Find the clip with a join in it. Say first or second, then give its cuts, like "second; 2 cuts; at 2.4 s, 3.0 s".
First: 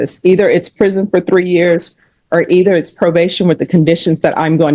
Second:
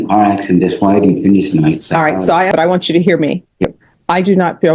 second; 2 cuts; at 2.5 s, 3.7 s